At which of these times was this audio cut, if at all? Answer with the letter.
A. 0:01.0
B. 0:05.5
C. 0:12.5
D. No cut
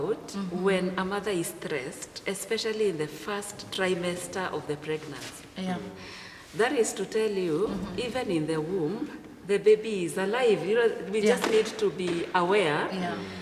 D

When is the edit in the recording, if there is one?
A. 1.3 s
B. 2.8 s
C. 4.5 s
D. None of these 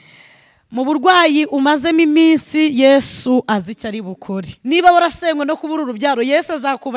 C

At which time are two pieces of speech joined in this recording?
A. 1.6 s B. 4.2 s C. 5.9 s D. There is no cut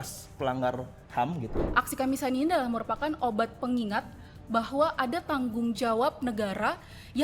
A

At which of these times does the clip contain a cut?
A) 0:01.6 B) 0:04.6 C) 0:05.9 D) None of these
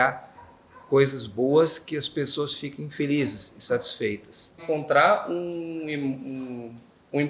B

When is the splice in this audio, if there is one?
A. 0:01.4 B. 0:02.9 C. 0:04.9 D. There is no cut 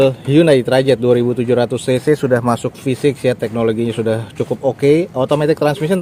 D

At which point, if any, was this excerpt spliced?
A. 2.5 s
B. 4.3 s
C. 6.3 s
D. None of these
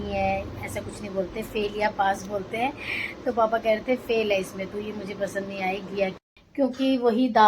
C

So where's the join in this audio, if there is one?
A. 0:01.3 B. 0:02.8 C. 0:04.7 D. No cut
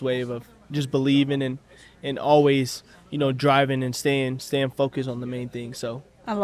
D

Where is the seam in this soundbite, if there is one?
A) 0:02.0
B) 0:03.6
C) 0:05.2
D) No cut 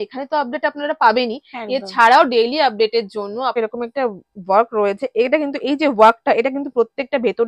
B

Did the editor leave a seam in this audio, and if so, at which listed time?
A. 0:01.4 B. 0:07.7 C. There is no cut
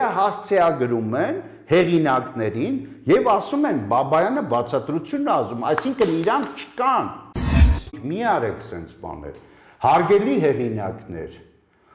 B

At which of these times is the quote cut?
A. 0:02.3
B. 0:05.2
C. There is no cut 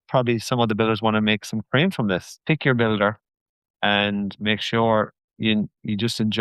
A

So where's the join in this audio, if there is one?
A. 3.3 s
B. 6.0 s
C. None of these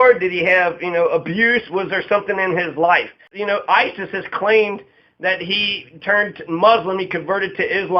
A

